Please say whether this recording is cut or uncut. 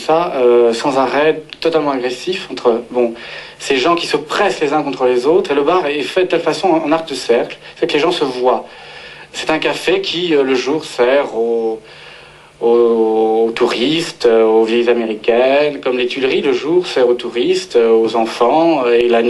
uncut